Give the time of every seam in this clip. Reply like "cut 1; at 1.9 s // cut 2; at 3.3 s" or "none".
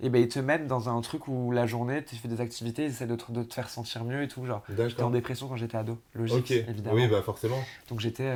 none